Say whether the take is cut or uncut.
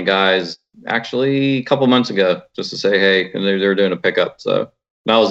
uncut